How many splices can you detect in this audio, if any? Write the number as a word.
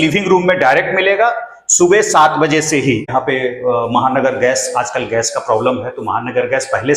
one